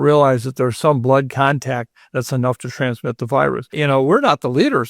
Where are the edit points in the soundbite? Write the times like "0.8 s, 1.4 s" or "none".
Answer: 3.7 s